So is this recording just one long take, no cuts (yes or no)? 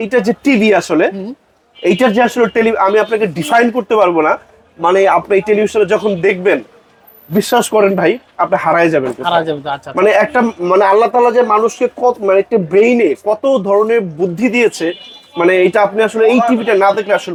yes